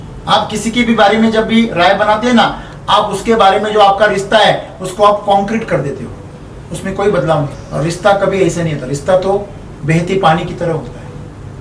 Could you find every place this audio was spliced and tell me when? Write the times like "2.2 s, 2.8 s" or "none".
7.6 s